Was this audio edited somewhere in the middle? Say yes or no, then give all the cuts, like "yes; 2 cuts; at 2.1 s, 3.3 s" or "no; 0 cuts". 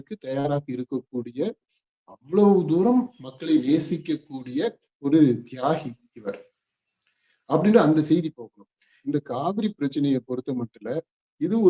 yes; 1 cut; at 9.0 s